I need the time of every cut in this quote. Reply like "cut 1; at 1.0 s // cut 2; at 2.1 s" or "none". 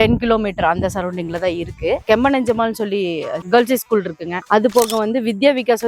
none